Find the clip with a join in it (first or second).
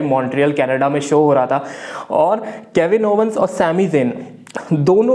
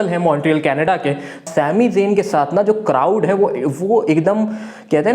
second